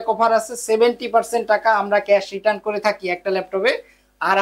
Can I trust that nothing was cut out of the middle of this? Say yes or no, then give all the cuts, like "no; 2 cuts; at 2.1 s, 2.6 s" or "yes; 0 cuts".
yes; 0 cuts